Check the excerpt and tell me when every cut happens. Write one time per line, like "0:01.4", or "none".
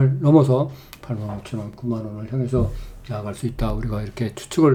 none